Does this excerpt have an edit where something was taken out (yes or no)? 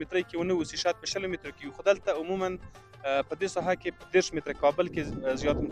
no